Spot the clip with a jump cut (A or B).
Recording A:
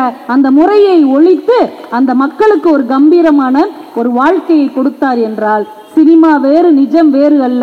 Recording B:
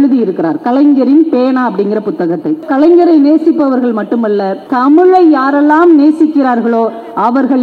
B